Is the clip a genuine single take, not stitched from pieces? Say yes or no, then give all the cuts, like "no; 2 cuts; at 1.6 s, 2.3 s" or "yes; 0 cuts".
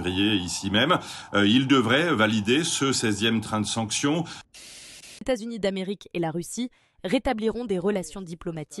no; 1 cut; at 4.4 s